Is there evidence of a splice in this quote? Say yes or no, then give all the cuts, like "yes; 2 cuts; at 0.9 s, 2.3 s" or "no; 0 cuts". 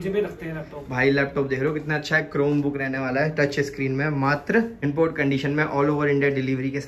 yes; 1 cut; at 4.7 s